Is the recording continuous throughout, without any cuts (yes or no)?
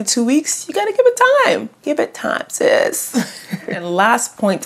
yes